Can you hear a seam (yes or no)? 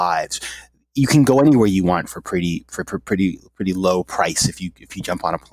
no